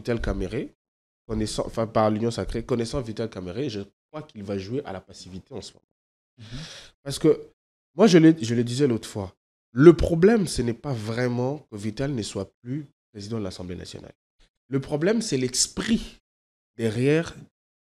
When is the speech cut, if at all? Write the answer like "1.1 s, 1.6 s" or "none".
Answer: none